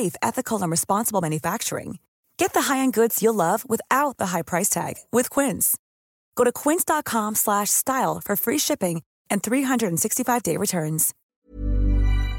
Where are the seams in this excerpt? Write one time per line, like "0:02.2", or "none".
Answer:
0:11.2